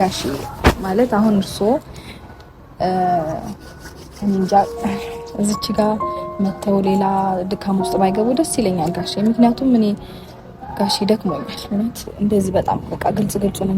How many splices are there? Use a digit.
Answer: 1